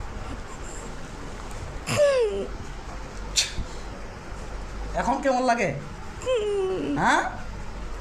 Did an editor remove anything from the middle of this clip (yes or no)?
no